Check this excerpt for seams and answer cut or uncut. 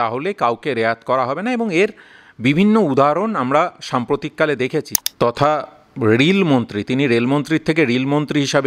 cut